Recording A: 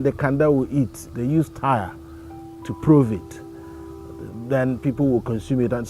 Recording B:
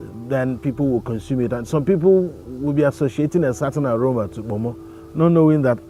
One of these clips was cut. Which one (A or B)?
A